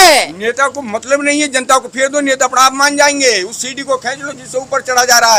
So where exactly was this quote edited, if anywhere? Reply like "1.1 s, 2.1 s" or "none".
none